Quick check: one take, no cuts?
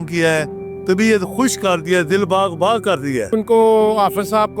no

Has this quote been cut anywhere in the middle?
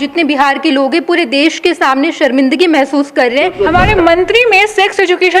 yes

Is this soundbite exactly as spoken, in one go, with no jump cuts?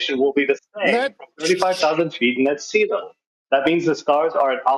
yes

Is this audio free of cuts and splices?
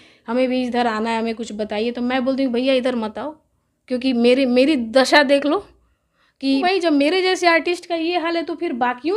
no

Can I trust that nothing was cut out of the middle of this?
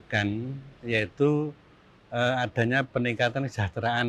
yes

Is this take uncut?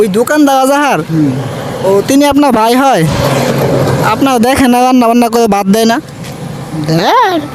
yes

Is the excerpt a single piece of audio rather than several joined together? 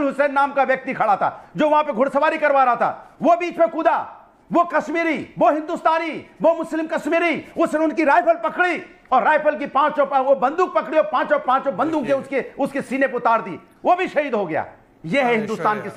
yes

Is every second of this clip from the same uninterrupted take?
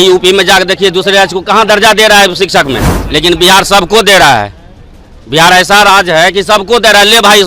no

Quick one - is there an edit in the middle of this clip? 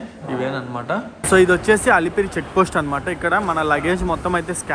yes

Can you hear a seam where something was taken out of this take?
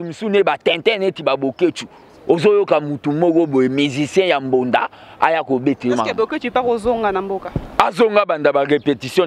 no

